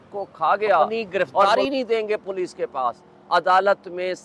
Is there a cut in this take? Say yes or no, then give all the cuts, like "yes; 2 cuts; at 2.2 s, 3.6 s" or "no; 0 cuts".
yes; 1 cut; at 1.5 s